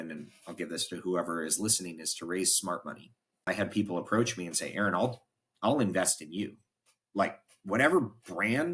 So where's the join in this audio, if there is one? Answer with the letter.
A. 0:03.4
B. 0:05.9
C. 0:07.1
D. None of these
A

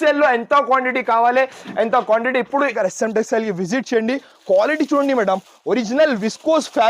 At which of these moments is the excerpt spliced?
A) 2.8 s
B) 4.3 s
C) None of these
A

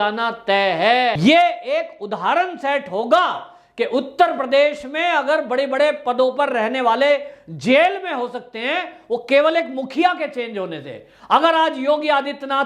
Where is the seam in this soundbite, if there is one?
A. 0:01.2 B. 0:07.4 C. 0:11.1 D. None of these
A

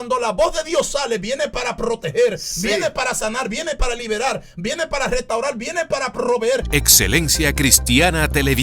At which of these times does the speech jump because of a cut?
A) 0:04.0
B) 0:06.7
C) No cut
B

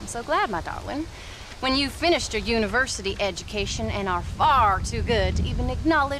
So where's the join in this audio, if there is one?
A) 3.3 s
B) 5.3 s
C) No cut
B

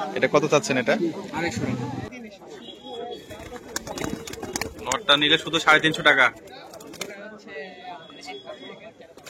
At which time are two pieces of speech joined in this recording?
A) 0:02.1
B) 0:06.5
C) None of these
A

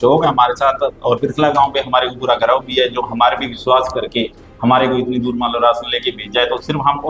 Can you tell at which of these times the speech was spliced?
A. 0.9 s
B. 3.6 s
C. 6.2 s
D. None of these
D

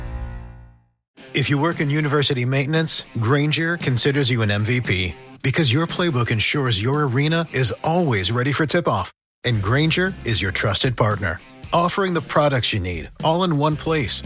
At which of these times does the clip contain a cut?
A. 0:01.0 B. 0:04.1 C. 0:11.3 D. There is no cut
A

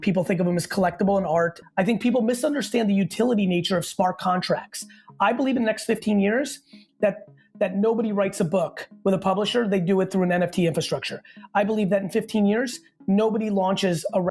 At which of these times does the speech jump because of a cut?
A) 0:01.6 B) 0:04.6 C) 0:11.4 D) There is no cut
A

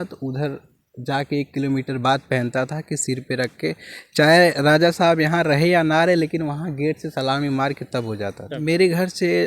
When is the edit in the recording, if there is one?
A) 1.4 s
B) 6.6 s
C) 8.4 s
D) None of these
C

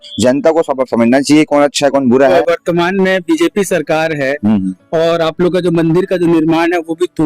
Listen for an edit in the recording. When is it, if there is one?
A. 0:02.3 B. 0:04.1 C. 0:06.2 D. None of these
A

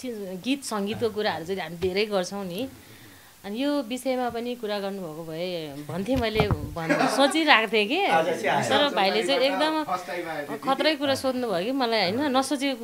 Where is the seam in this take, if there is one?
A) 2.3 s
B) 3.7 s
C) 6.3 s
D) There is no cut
D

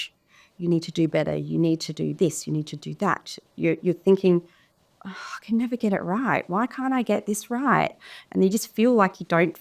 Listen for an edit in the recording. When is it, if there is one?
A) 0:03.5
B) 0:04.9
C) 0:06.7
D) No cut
D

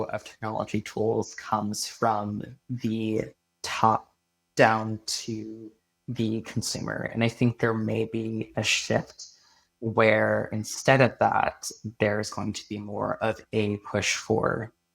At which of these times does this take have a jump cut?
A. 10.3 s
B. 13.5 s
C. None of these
C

